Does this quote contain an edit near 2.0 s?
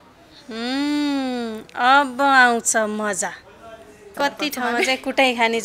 no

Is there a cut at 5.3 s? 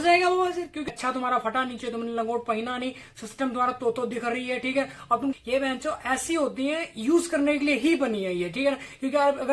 yes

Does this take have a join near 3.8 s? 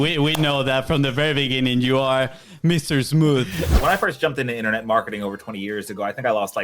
yes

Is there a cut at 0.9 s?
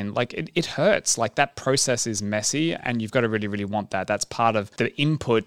no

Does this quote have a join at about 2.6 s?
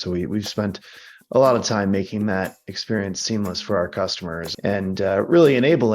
no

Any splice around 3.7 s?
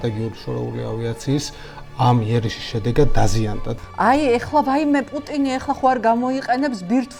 yes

